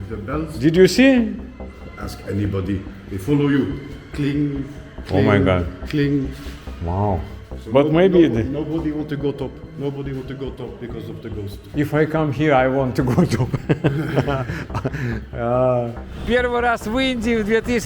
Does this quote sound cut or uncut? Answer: cut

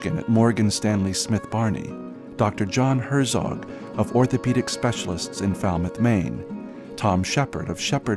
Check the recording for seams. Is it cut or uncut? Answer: uncut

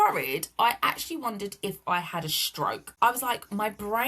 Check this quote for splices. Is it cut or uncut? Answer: cut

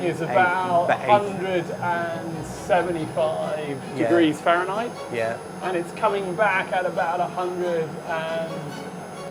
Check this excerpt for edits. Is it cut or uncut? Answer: uncut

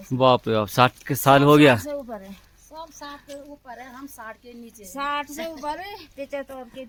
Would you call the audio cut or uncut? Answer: uncut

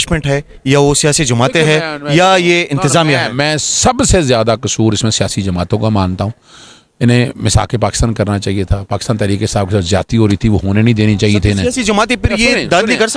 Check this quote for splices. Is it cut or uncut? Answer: uncut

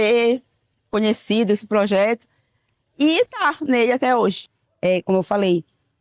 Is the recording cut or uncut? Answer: uncut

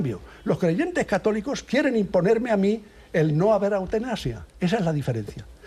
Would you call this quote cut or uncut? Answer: uncut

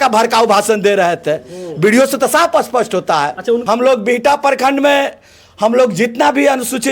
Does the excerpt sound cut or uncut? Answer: cut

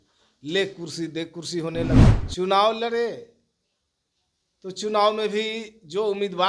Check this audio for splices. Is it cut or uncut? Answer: cut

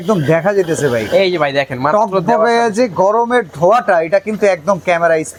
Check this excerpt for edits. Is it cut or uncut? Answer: uncut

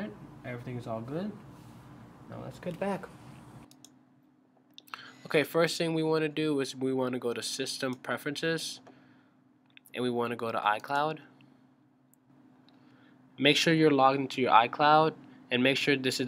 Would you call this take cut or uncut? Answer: uncut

